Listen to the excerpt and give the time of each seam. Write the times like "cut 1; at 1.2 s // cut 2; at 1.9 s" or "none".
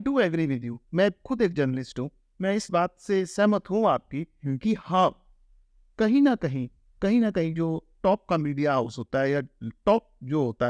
none